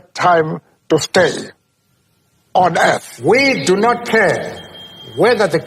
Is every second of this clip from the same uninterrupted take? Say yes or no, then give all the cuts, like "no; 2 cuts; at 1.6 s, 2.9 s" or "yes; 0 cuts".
no; 1 cut; at 3.1 s